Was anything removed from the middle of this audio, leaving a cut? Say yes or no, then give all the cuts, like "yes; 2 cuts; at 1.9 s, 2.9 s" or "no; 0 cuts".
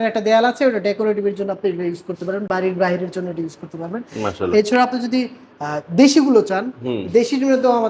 no; 0 cuts